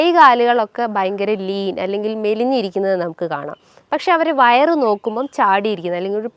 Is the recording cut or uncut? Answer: uncut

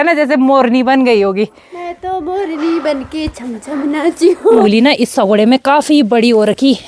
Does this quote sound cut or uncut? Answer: cut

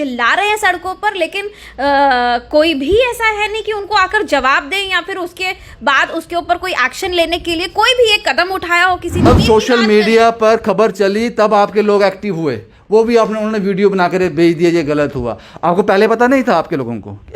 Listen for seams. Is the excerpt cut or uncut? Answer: cut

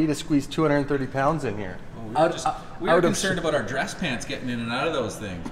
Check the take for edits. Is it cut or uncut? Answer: uncut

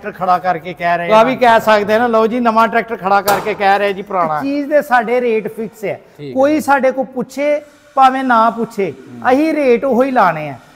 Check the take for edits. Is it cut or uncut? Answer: cut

